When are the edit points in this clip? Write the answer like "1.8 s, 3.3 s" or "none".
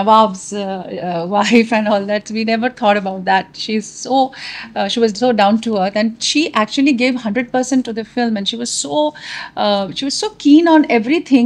none